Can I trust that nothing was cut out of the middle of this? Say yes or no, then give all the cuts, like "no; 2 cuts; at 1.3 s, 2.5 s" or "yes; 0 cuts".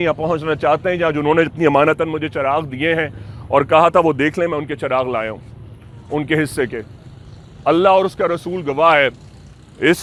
yes; 0 cuts